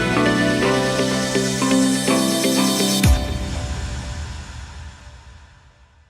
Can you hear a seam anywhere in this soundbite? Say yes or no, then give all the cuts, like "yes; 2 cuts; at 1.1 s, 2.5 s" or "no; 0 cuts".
yes; 1 cut; at 1.1 s